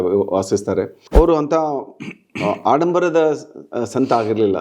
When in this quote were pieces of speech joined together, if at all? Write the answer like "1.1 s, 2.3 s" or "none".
1.0 s

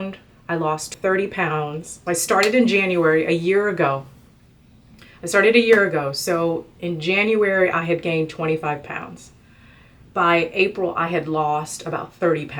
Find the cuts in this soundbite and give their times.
0.9 s, 1.9 s

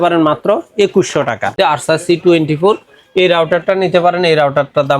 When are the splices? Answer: 1.6 s

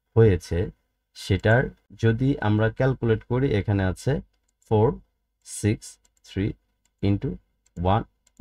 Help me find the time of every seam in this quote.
1.9 s

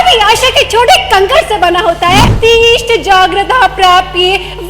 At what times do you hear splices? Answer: 2.3 s

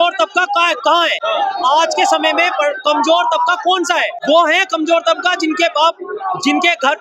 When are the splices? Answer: 1.2 s, 4.1 s

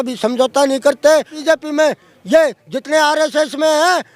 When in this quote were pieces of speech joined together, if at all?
1.3 s

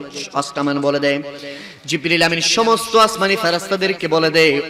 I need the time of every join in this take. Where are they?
none

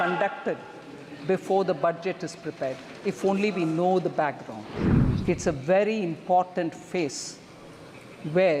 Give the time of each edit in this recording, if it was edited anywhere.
4.7 s

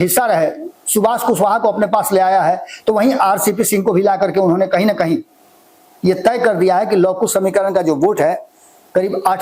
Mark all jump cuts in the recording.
none

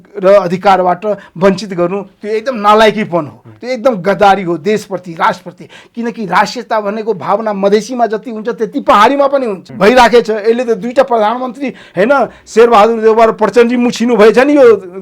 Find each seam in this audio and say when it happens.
9.6 s

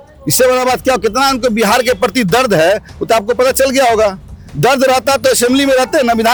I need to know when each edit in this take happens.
none

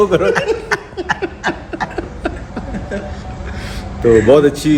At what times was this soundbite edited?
none

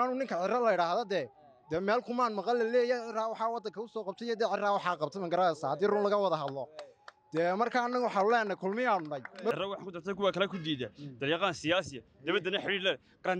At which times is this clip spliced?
9.5 s

